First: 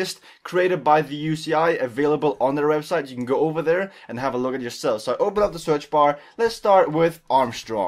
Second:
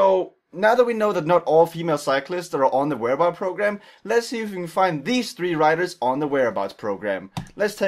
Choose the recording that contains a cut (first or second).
first